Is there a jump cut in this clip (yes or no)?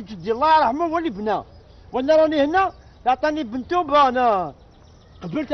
no